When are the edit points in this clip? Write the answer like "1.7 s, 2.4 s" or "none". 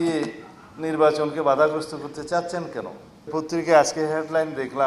3.3 s